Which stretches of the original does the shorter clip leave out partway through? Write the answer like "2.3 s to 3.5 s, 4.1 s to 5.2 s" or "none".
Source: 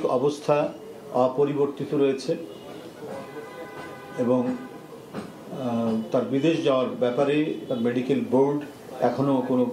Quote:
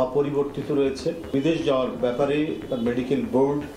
2.5 s to 6.3 s